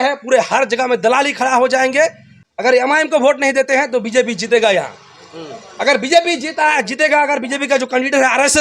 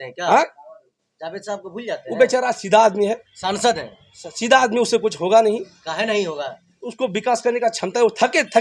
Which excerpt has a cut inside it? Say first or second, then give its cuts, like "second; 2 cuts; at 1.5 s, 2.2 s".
first; 1 cut; at 2.3 s